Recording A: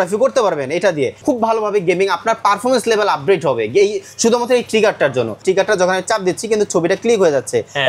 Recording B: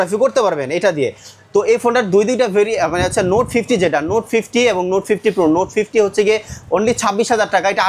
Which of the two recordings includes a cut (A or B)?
A